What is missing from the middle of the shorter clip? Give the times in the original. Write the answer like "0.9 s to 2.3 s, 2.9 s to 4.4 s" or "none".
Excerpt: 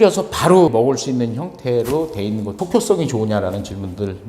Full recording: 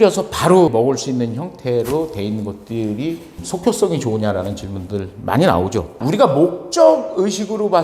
2.5 s to 3.5 s